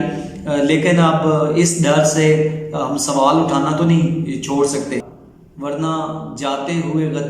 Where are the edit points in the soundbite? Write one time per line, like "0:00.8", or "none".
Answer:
0:05.0